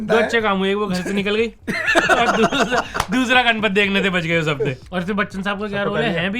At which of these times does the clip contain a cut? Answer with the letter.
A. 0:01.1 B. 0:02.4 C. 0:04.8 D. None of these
C